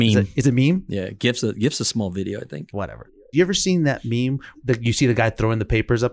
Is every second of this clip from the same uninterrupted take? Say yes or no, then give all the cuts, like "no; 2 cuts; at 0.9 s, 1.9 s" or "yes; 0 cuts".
no; 2 cuts; at 3.0 s, 4.5 s